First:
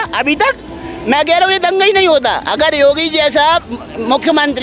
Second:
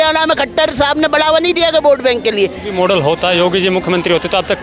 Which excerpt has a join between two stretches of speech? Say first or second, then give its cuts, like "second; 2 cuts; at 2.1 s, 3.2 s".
second; 1 cut; at 2.6 s